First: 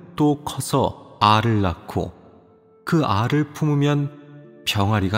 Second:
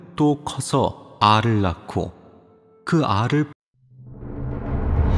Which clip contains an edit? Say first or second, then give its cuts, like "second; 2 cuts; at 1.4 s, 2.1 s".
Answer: first; 1 cut; at 3.5 s